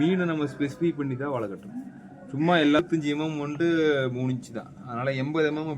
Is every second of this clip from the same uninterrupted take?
no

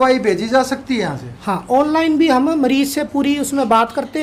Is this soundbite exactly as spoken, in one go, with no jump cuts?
yes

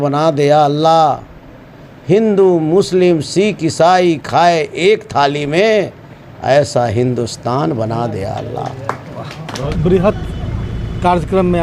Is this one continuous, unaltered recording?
no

